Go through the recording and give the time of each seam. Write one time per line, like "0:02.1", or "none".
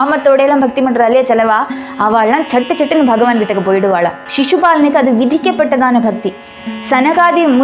0:04.2